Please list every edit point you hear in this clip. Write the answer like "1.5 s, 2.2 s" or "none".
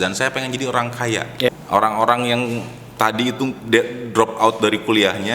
1.5 s